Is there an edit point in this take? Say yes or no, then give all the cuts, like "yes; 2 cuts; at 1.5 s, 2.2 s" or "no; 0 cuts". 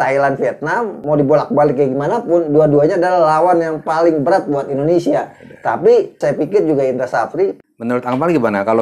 yes; 3 cuts; at 1.0 s, 6.2 s, 7.5 s